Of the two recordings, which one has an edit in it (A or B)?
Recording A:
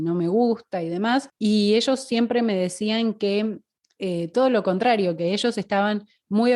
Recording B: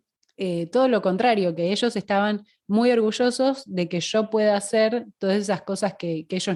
A